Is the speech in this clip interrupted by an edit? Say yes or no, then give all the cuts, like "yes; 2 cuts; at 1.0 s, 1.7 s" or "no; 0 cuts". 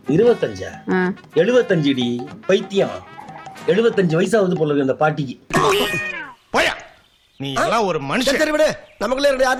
no; 0 cuts